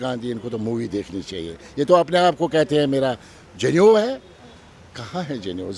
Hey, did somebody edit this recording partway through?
no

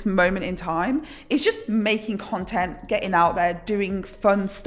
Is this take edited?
no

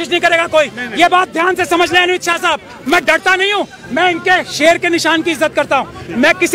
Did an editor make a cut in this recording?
no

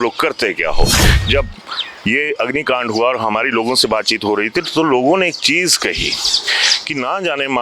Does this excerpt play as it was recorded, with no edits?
no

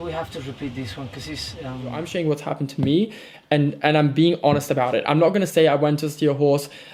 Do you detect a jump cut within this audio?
yes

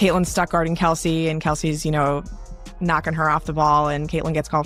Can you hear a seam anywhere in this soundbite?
no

